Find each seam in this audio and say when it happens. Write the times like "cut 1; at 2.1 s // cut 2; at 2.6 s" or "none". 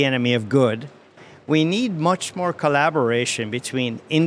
cut 1; at 1.1 s